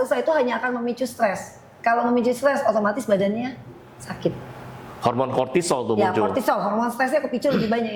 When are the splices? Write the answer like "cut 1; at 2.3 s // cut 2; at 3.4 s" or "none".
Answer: none